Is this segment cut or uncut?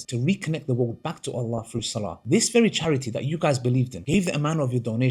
uncut